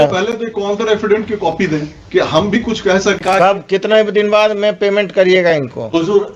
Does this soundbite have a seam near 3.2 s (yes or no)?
yes